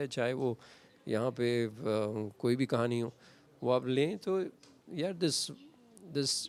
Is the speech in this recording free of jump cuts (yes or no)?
yes